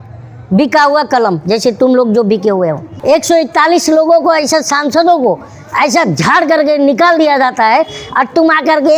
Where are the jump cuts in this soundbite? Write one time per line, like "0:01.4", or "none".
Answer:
0:02.9